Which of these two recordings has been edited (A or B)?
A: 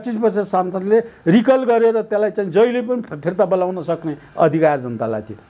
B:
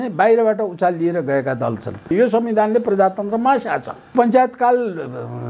B